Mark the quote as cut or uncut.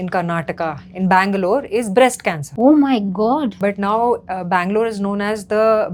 cut